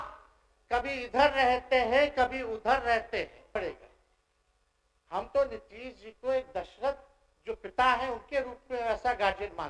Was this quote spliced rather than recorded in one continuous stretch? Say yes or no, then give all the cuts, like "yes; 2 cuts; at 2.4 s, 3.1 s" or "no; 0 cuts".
yes; 1 cut; at 3.5 s